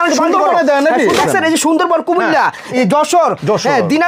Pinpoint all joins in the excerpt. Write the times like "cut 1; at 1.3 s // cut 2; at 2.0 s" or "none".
cut 1; at 1.2 s // cut 2; at 2.7 s